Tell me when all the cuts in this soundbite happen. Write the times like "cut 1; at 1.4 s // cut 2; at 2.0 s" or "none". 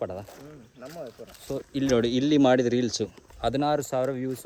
none